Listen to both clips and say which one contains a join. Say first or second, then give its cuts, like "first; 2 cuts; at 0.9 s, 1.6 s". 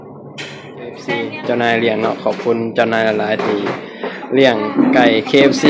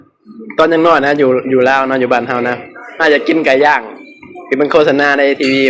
first; 1 cut; at 1.1 s